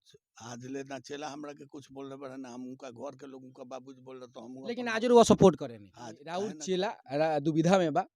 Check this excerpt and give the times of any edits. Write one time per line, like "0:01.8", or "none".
0:06.3